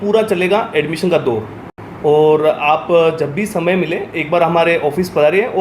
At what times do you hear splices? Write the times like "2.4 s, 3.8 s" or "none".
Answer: none